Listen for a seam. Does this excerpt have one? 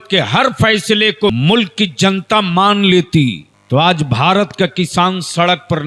yes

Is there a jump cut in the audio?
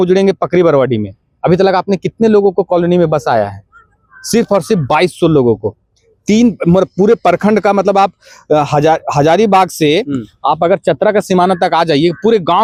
no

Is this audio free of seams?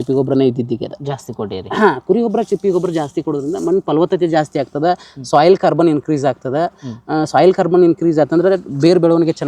yes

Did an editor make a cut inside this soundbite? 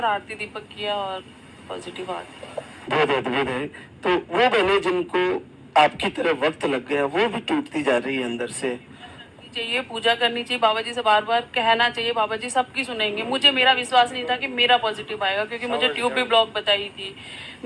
no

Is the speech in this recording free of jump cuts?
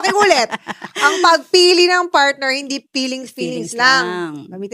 yes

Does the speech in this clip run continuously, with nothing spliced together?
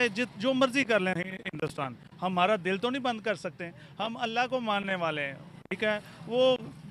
yes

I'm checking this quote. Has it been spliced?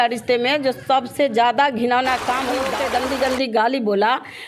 yes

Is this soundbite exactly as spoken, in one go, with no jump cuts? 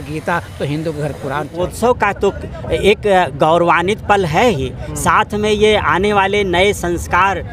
no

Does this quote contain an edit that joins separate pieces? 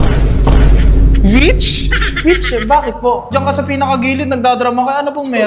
yes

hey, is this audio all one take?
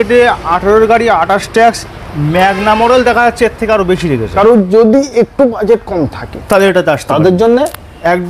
no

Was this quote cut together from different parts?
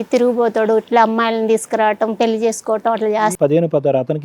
yes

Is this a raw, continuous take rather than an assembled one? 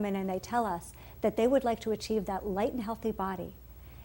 no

